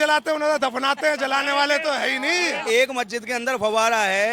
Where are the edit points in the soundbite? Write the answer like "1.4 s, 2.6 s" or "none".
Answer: 2.6 s